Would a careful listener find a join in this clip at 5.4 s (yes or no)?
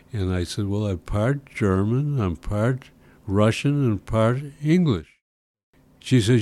yes